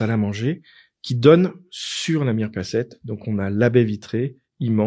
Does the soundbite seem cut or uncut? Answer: uncut